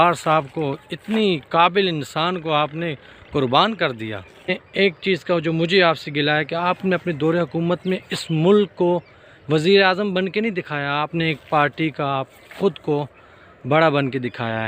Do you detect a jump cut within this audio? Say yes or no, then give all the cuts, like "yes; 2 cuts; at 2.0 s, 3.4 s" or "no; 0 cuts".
yes; 1 cut; at 4.6 s